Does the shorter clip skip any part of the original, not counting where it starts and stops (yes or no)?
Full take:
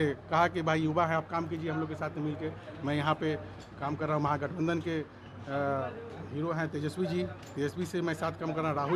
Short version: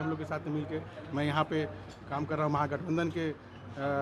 no